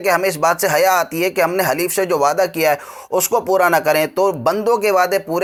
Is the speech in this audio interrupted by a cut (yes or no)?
no